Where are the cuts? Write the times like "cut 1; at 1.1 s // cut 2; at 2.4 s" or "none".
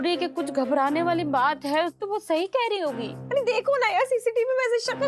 cut 1; at 2.0 s // cut 2; at 3.1 s